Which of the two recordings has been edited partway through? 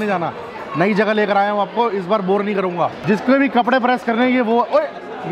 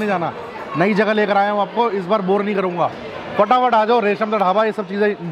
first; 1 cut; at 3.0 s

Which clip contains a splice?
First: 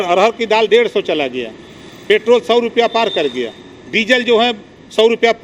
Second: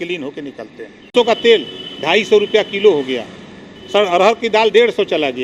second; 1 cut; at 1.1 s

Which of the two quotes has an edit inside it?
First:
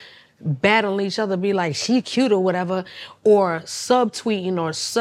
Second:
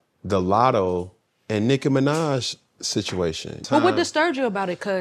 second; 1 cut; at 3.6 s

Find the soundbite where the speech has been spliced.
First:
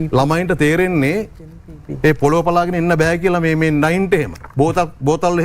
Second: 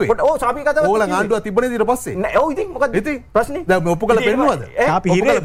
first; 1 cut; at 4.4 s

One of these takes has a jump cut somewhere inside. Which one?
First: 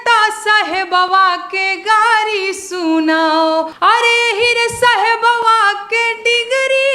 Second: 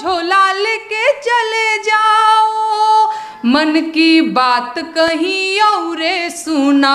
first; 1 cut; at 3.7 s

